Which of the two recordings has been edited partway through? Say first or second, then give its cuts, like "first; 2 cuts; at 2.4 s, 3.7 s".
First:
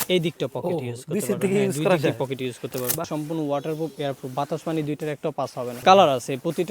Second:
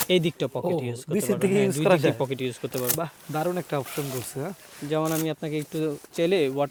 first; 2 cuts; at 3.1 s, 5.7 s